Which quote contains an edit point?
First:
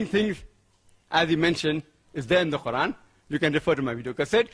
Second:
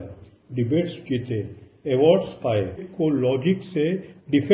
second; 1 cut; at 2.9 s

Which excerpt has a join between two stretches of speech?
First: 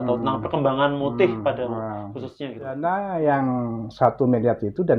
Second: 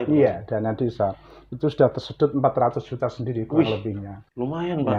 first; 1 cut; at 2.8 s

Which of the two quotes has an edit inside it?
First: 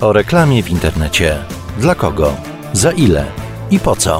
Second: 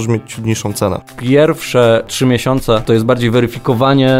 second; 2 cuts; at 1.1 s, 2.3 s

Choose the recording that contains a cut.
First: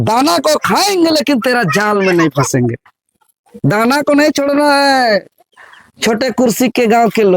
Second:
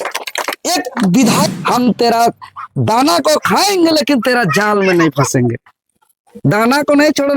second; 1 cut; at 1.5 s

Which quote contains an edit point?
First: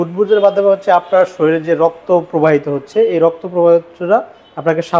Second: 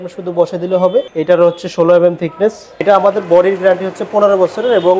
second; 2 cuts; at 1.1 s, 2.8 s

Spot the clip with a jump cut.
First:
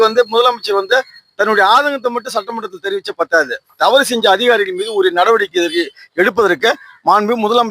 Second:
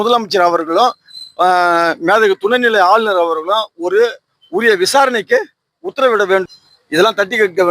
second; 1 cut; at 6.4 s

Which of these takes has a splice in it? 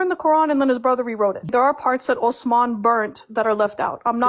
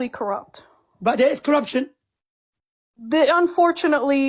first; 1 cut; at 1.5 s

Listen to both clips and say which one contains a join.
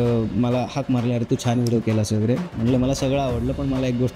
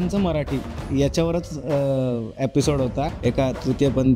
second; 1 cut; at 3.1 s

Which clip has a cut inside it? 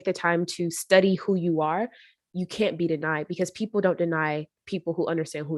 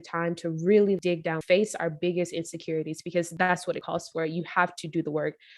second; 2 cuts; at 1.1 s, 3.4 s

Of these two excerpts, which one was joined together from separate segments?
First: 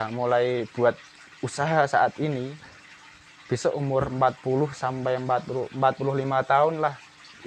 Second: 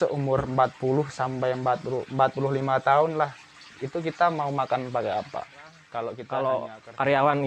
second; 1 cut; at 5.8 s

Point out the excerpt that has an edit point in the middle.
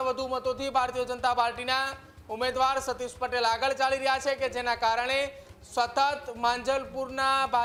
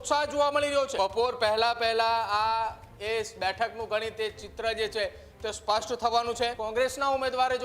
second; 2 cuts; at 0.9 s, 6.6 s

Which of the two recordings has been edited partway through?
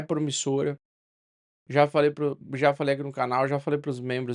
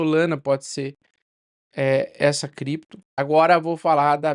second; 1 cut; at 3.0 s

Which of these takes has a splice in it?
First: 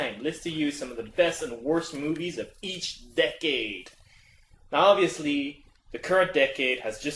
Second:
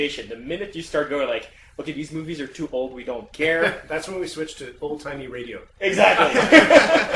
first; 1 cut; at 2.6 s

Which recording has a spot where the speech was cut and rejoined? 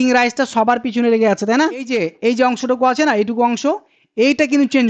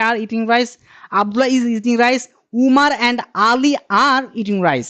first; 1 cut; at 1.9 s

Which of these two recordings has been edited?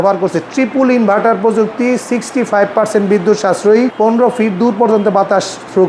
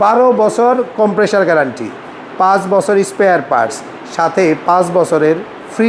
first; 1 cut; at 3.9 s

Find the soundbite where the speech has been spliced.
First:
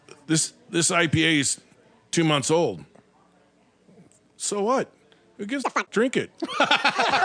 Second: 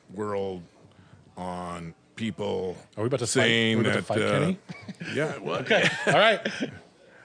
first; 1 cut; at 5.8 s

